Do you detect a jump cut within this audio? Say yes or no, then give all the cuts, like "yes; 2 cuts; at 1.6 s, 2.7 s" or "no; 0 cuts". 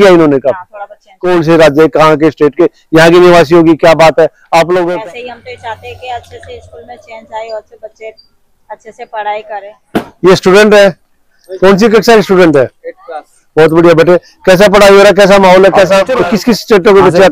yes; 4 cuts; at 1.1 s, 4.9 s, 9.8 s, 16.0 s